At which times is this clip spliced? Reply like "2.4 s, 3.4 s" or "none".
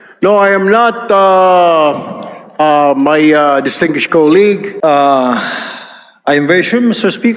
4.7 s